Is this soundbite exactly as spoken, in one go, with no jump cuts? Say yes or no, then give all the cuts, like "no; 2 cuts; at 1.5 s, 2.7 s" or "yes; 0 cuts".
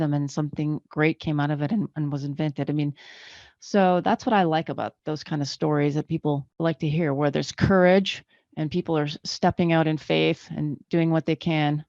no; 2 cuts; at 5.0 s, 6.5 s